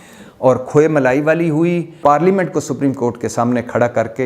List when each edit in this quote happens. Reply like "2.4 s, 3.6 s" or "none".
2.0 s